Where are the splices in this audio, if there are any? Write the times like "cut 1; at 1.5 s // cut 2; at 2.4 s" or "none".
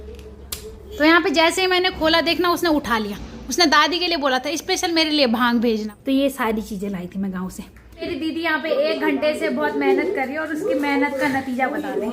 cut 1; at 1.0 s // cut 2; at 5.9 s // cut 3; at 8.1 s